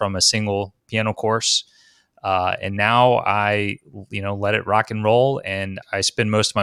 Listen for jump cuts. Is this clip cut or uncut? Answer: uncut